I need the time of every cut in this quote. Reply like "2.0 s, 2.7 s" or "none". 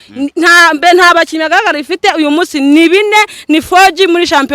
none